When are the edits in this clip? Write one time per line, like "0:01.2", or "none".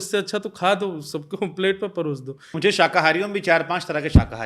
0:02.6

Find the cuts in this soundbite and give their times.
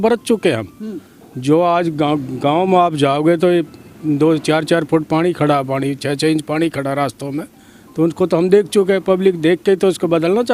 none

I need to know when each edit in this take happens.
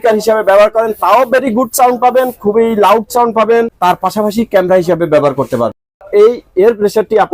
0:03.7
0:06.0

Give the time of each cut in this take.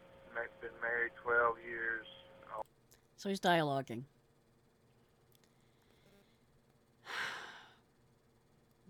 none

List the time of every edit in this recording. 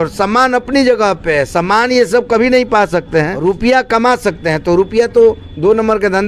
0:03.3

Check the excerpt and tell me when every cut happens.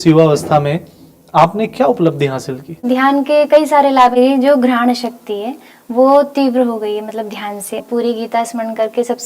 0:02.8
0:04.2
0:07.8

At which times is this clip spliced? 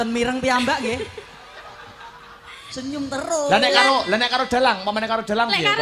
0:02.8

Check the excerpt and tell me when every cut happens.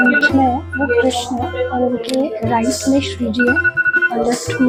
none

